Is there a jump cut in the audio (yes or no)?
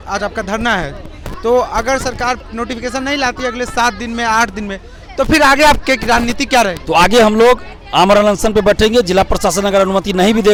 no